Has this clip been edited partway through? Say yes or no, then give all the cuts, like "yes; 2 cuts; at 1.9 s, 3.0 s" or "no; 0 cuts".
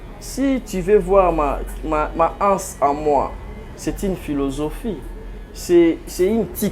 no; 0 cuts